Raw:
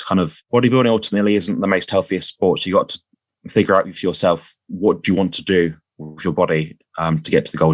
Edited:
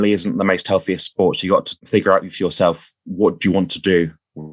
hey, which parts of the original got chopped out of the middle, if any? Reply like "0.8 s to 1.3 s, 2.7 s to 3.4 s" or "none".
3.0 s to 3.4 s